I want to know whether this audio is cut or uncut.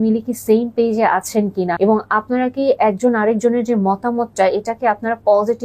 cut